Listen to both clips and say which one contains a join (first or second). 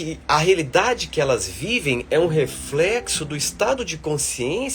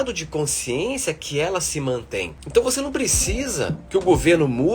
second